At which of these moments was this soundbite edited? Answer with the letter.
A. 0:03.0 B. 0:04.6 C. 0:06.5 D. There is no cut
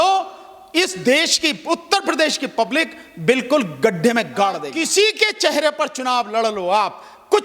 B